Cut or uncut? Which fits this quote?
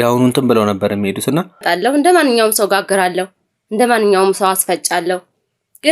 cut